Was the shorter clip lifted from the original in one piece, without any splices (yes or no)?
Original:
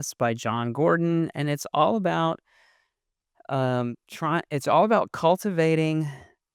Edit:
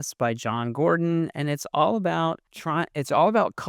no